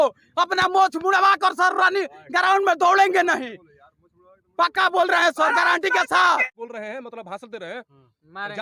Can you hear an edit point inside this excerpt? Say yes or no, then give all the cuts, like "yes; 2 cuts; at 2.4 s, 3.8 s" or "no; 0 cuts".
yes; 1 cut; at 6.5 s